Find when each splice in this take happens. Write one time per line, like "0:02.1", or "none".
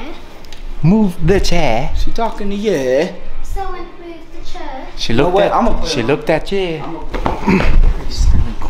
0:07.0